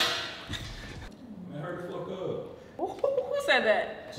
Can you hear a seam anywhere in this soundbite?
yes; 1 cut; at 0.9 s

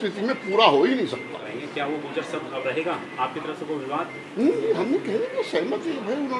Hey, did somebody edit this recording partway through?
yes; 1 cut; at 1.4 s

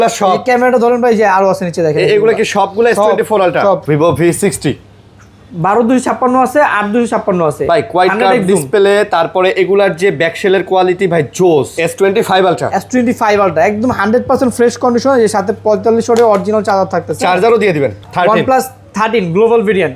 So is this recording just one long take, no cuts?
no; 3 cuts; at 3.8 s, 11.8 s, 18.0 s

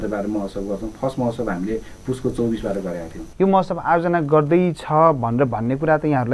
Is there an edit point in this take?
yes; 1 cut; at 3.2 s

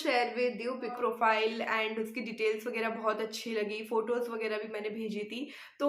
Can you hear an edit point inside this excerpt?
yes; 1 cut; at 1.0 s

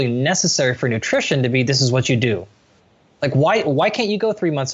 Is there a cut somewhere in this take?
yes; 1 cut; at 2.5 s

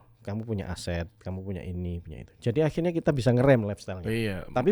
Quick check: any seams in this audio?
no; 0 cuts

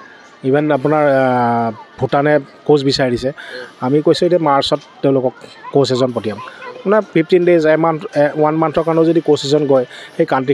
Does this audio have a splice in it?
no; 0 cuts

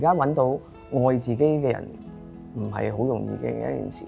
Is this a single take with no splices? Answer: yes; 0 cuts

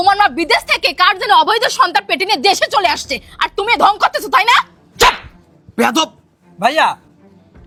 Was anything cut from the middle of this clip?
no; 0 cuts

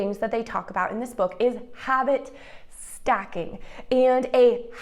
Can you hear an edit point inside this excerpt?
no; 0 cuts

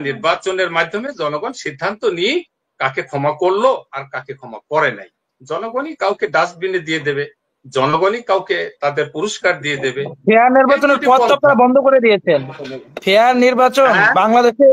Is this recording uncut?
yes; 0 cuts

